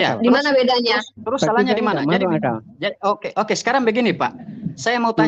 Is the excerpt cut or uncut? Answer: uncut